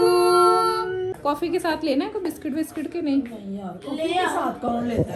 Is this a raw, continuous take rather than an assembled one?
no; 1 cut; at 1.1 s

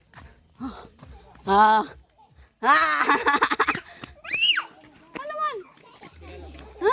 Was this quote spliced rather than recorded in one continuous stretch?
no; 0 cuts

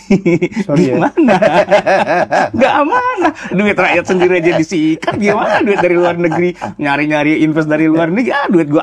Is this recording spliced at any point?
no; 0 cuts

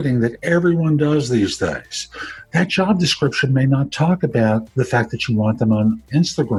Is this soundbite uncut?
yes; 0 cuts

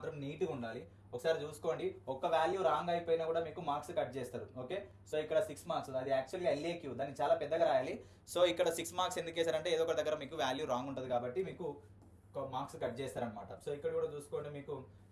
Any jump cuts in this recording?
no; 0 cuts

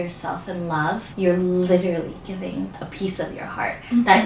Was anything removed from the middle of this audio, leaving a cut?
yes; 2 cuts; at 1.1 s, 2.8 s

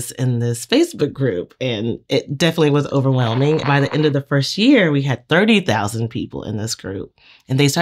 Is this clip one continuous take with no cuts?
no; 1 cut; at 3.6 s

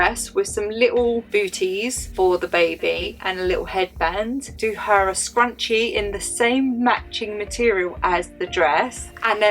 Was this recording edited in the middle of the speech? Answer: yes; 2 cuts; at 3.1 s, 4.6 s

